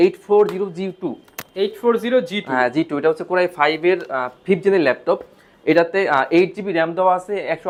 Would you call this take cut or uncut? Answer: uncut